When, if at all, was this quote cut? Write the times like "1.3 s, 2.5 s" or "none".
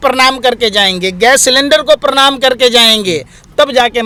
none